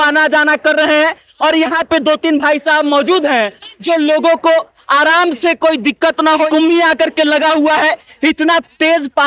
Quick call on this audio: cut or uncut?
cut